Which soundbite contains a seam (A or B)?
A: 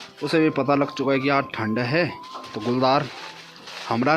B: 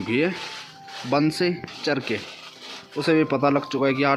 A